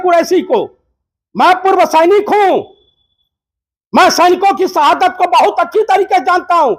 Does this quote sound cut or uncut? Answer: uncut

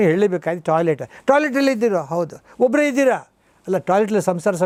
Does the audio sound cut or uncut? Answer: uncut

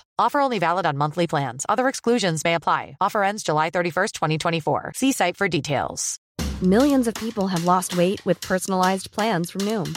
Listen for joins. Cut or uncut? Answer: cut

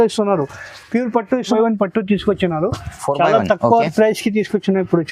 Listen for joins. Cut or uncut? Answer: cut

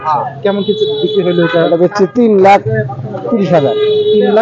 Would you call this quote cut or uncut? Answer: uncut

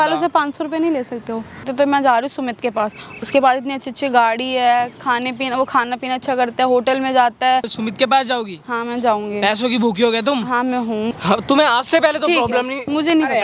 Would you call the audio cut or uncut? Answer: cut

